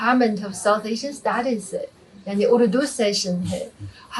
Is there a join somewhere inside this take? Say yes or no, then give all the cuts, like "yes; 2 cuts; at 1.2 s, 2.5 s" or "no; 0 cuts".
no; 0 cuts